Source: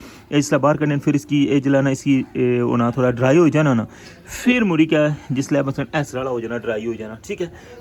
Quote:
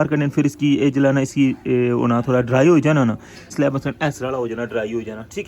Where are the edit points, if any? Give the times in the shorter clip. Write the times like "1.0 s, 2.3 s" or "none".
3.5 s